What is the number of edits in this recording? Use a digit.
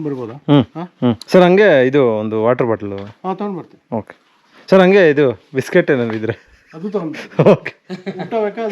1